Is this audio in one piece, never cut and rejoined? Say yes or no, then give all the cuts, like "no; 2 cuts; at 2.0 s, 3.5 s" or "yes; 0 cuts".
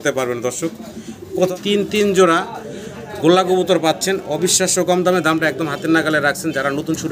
no; 1 cut; at 1.5 s